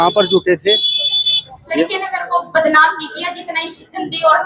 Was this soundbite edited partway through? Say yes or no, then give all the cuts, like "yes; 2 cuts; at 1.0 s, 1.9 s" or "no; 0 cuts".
yes; 1 cut; at 1.8 s